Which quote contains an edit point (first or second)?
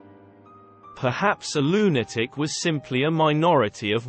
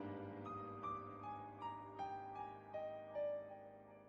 first